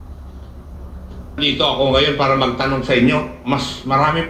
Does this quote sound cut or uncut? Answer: cut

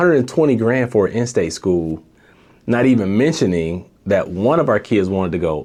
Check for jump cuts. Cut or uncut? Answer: uncut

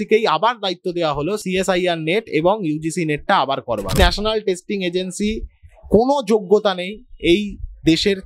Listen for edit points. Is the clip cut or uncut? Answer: cut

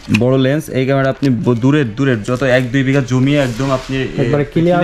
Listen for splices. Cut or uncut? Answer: uncut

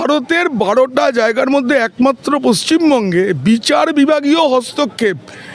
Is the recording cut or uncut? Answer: uncut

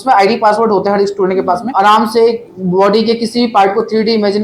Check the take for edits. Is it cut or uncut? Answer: cut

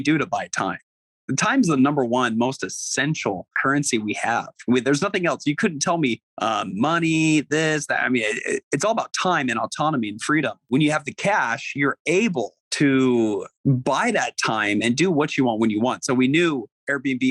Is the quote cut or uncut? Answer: cut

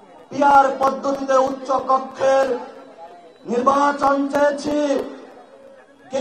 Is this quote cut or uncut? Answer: uncut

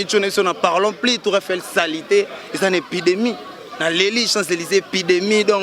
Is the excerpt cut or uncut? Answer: uncut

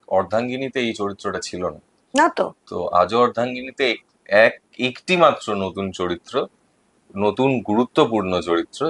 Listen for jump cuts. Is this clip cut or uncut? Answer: uncut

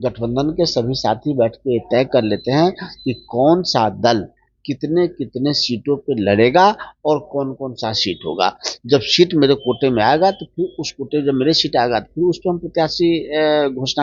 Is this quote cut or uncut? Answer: uncut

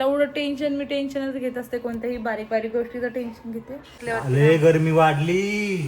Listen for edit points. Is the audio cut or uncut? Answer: cut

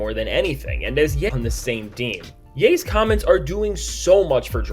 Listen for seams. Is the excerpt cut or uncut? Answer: cut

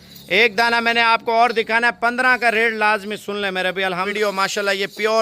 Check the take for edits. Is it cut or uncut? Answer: cut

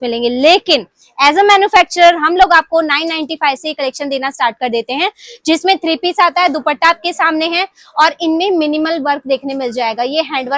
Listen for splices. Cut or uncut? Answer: uncut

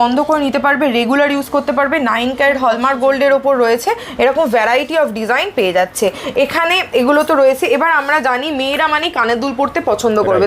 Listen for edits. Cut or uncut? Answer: uncut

